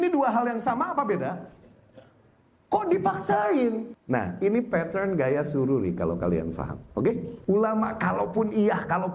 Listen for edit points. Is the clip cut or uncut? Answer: cut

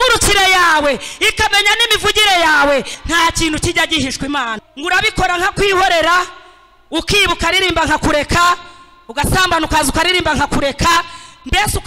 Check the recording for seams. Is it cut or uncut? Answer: cut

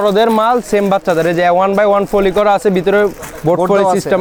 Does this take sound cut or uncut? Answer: uncut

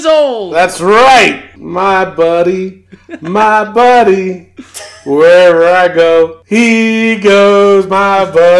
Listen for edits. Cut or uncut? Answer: cut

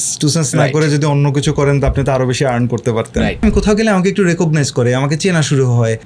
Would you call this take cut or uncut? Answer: cut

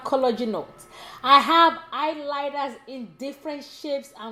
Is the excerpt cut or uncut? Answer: uncut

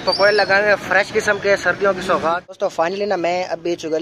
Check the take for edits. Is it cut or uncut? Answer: cut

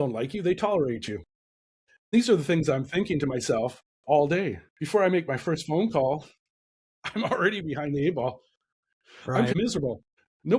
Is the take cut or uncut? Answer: cut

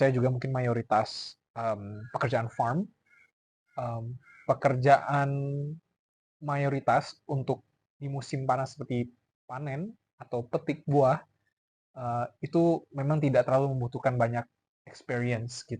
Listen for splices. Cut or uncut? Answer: uncut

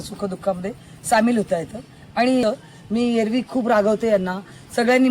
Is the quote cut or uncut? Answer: cut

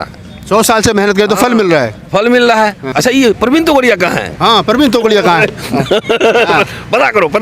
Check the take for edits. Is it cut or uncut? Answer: cut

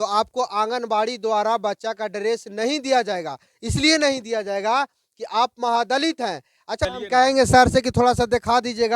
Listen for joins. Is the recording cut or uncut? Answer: cut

